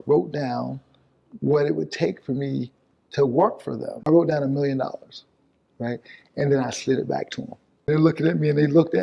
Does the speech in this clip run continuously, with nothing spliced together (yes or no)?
no